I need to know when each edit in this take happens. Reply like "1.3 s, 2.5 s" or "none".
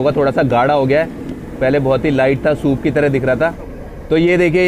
3.7 s